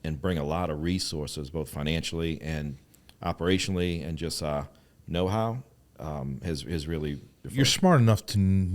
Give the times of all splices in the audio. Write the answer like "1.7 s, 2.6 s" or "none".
7.4 s